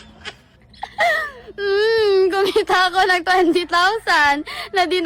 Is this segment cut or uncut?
uncut